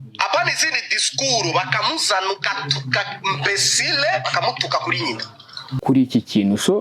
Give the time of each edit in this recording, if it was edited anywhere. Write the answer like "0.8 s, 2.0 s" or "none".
5.7 s

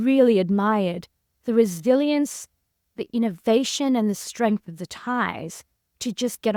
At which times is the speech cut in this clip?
none

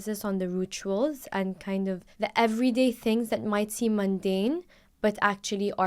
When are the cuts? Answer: 2.1 s

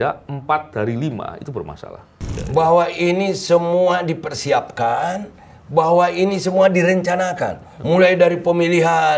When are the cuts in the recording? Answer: 2.4 s

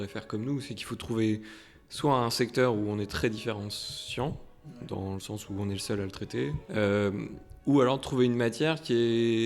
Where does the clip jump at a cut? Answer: 6.6 s

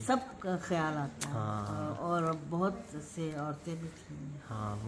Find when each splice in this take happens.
none

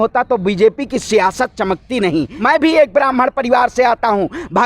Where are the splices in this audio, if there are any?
2.3 s

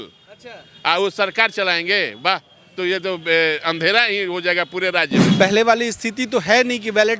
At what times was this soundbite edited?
5.2 s

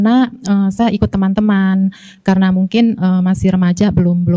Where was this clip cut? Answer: none

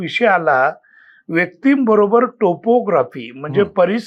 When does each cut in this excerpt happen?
none

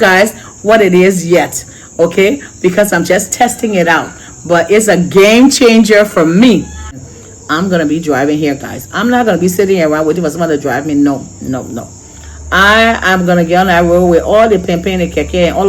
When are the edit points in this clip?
6.9 s

